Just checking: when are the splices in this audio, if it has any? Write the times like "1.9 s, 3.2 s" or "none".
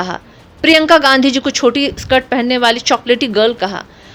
none